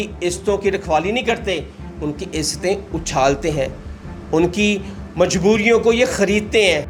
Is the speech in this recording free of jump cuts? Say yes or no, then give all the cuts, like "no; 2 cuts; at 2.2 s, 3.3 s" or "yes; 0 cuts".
yes; 0 cuts